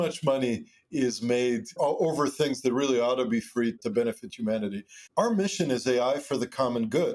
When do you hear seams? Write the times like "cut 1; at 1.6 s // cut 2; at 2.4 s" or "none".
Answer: cut 1; at 1.8 s // cut 2; at 5.0 s